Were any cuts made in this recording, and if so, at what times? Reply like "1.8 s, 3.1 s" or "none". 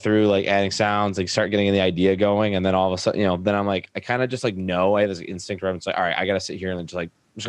none